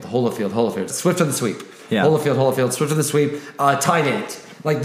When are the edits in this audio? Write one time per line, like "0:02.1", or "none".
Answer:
0:00.9